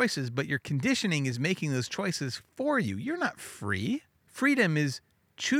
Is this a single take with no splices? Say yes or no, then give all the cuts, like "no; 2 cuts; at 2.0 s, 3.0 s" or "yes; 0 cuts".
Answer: no; 1 cut; at 4.2 s